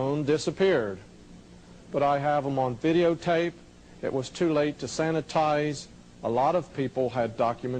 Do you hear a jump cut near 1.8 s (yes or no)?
yes